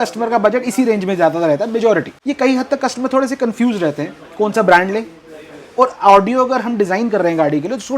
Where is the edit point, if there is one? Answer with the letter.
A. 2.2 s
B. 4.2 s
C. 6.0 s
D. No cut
A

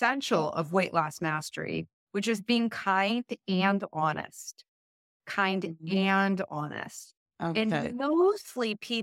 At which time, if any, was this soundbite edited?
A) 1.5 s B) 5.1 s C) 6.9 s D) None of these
D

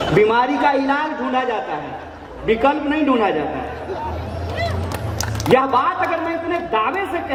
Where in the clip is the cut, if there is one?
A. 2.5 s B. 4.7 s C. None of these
C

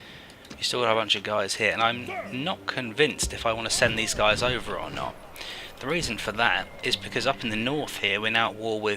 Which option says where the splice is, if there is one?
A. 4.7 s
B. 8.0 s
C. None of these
A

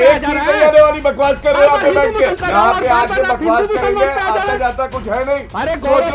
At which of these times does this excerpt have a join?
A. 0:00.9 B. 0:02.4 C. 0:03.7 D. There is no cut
B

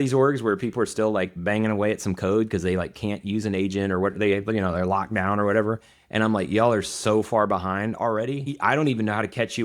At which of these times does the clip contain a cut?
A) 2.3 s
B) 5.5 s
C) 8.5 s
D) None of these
C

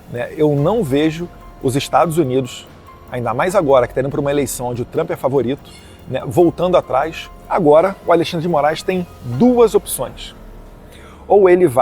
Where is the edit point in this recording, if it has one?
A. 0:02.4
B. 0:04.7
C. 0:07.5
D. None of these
C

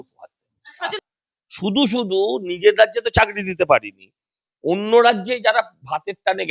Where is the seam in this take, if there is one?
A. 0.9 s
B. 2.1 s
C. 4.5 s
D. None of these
A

